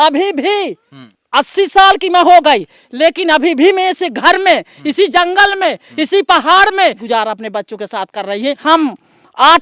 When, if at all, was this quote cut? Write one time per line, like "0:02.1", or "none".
0:01.0
0:07.0
0:08.6